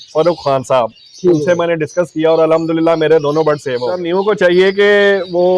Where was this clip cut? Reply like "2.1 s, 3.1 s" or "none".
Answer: 4.0 s